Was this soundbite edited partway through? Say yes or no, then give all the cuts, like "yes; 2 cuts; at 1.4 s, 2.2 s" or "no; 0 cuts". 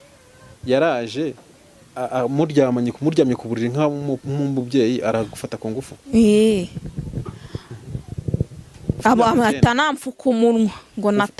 yes; 1 cut; at 9.0 s